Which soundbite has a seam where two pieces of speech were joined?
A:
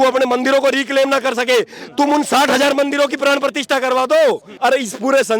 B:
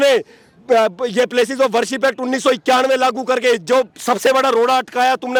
A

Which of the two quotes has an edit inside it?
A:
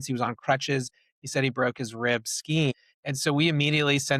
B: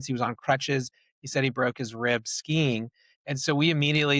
A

